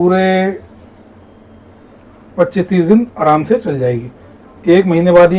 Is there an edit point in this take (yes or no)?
no